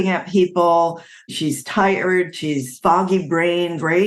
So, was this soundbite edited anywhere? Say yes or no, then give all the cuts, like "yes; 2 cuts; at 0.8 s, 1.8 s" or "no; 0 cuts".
yes; 2 cuts; at 1.3 s, 2.7 s